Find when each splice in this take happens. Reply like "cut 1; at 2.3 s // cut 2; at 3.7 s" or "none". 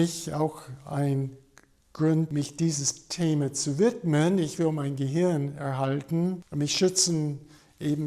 cut 1; at 2.3 s // cut 2; at 6.4 s